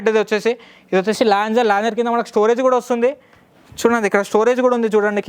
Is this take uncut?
yes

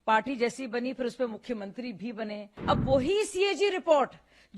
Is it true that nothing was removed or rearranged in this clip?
no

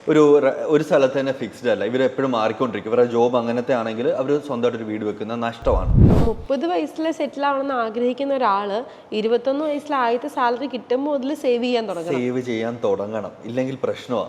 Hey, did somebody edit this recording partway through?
yes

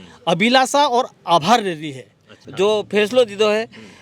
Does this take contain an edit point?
yes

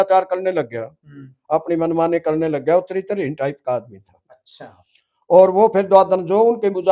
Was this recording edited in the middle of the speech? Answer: no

